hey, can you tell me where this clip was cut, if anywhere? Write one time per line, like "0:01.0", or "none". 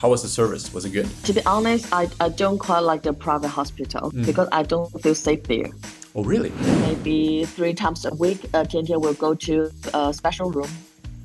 0:04.1
0:06.8